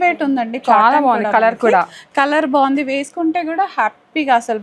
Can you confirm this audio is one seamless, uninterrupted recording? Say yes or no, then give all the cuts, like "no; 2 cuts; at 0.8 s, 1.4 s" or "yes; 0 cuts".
yes; 0 cuts